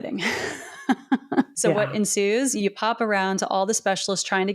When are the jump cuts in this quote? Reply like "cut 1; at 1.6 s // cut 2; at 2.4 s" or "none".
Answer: cut 1; at 1.5 s // cut 2; at 2.6 s